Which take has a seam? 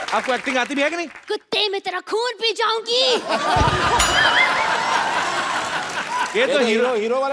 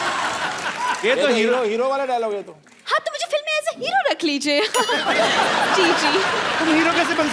first; 1 cut; at 1.1 s

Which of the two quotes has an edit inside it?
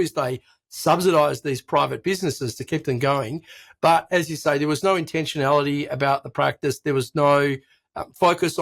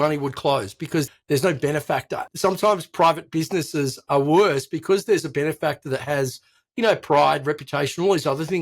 second; 2 cuts; at 1.1 s, 2.2 s

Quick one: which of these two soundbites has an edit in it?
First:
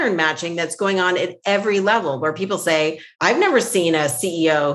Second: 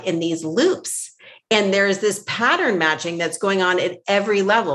first; 1 cut; at 3.1 s

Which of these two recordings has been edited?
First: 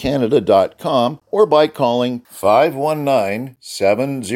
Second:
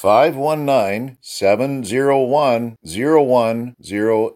first; 1 cut; at 1.2 s

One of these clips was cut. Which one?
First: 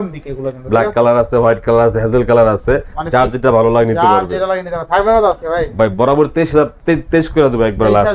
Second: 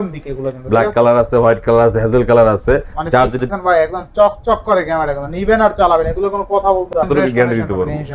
second; 2 cuts; at 3.4 s, 7.0 s

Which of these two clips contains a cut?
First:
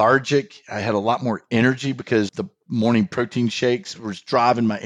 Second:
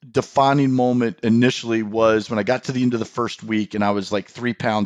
first; 2 cuts; at 2.3 s, 4.0 s

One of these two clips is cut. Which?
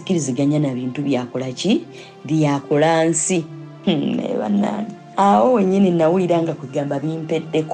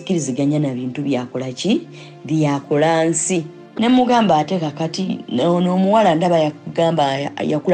second; 1 cut; at 3.6 s

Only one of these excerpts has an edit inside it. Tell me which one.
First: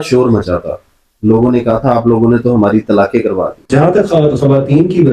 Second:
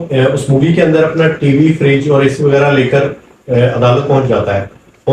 first; 1 cut; at 3.5 s

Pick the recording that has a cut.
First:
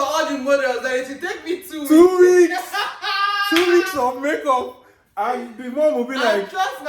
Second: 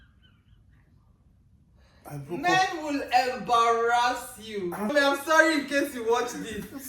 second; 1 cut; at 4.9 s

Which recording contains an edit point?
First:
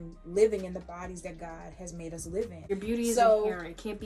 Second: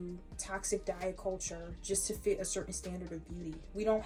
first; 1 cut; at 2.6 s

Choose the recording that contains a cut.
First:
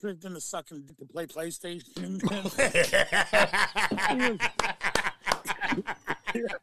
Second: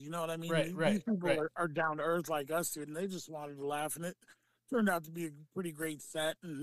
first; 1 cut; at 0.9 s

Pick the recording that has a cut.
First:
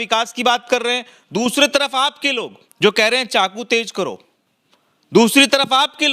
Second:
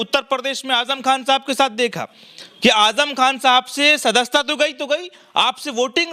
first; 1 cut; at 2.6 s

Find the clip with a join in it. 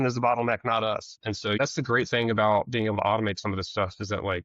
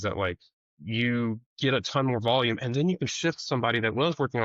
first; 1 cut; at 1.6 s

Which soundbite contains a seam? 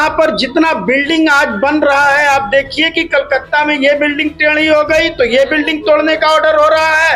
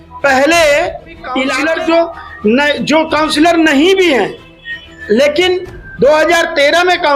second; 1 cut; at 1.5 s

